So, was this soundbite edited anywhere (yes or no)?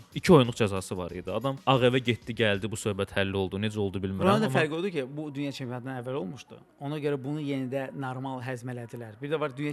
yes